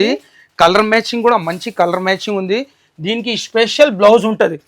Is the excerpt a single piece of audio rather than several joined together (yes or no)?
yes